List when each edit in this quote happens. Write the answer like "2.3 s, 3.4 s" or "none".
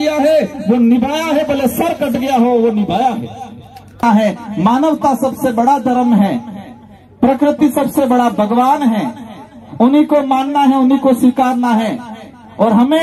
4.0 s